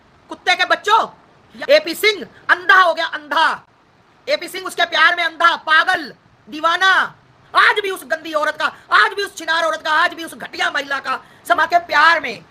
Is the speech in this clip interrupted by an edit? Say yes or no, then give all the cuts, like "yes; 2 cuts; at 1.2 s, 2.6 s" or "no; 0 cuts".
yes; 3 cuts; at 1.5 s, 7.4 s, 11.6 s